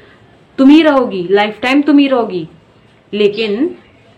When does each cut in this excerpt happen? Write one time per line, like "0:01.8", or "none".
none

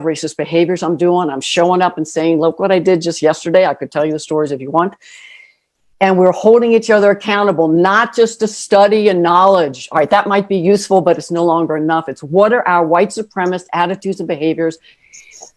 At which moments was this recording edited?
none

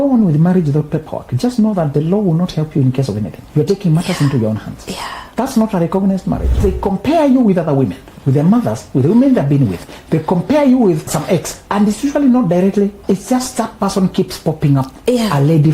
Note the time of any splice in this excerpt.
0:03.4
0:05.2
0:06.6
0:11.3
0:13.0

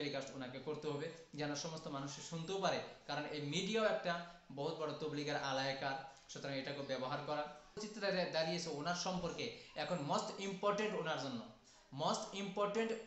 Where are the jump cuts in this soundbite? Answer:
0:07.9

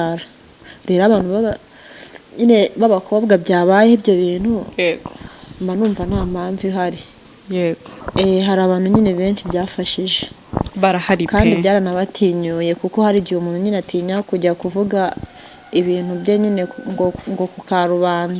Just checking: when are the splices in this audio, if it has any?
0:07.9

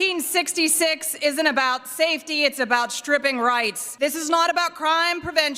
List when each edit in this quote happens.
0:03.8

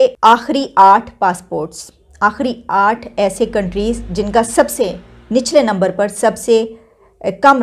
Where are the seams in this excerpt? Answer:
none

